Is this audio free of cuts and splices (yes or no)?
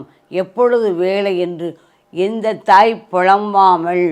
yes